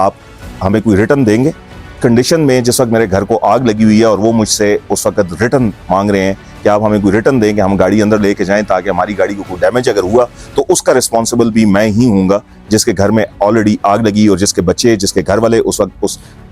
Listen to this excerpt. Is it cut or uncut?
cut